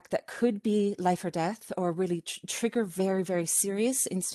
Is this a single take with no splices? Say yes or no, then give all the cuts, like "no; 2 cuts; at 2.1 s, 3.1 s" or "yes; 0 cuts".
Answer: yes; 0 cuts